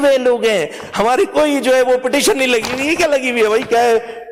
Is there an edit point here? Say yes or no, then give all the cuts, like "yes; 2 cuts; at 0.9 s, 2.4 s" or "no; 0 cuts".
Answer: no; 0 cuts